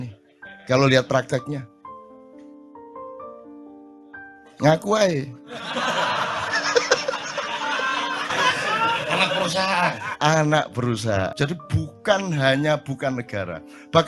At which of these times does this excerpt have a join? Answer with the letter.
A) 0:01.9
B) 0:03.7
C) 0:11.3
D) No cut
C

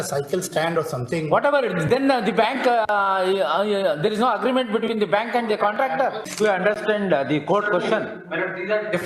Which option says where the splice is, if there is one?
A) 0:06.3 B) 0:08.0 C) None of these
A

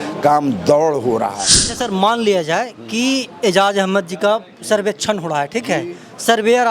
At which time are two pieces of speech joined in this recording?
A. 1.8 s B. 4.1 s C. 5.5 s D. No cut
A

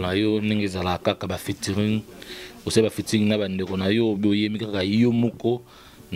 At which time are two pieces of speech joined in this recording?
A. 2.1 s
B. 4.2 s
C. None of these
C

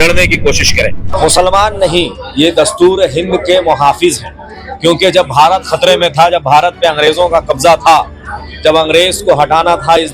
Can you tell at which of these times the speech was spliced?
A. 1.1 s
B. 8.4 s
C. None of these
A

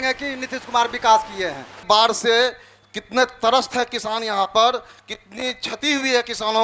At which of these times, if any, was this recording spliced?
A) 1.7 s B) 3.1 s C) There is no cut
A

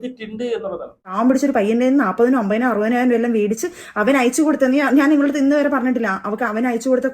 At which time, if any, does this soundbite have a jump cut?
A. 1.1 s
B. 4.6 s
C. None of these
A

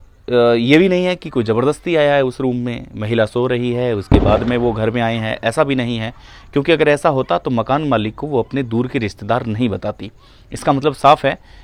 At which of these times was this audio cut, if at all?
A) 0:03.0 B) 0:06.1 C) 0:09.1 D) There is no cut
D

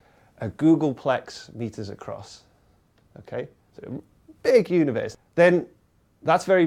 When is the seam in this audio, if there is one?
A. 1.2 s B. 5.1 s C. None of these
B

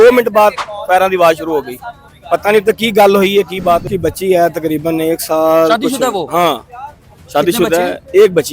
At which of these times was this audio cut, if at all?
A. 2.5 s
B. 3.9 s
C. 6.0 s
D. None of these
B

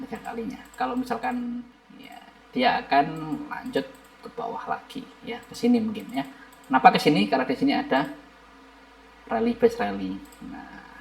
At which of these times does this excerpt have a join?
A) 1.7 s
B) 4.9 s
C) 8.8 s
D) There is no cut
A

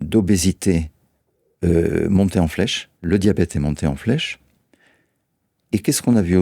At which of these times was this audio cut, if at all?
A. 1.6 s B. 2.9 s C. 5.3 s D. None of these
B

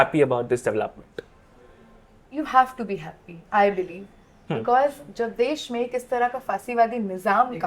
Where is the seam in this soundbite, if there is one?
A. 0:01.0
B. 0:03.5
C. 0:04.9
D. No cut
D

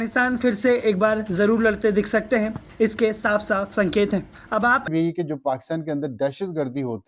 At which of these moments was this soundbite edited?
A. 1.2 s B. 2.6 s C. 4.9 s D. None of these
C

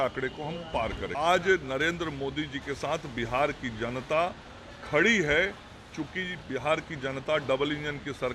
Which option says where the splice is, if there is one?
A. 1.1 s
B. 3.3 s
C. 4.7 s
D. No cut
A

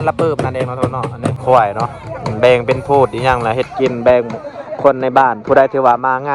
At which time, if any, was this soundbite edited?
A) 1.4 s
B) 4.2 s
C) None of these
A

